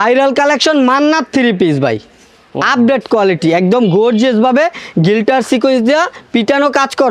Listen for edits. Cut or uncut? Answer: uncut